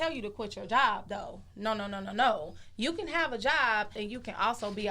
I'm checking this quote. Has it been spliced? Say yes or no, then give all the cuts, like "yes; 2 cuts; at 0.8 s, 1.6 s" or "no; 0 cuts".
yes; 1 cut; at 3.9 s